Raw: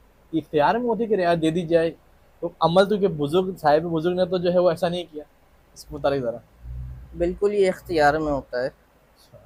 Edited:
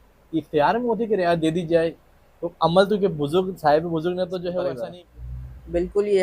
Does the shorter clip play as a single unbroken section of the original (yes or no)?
no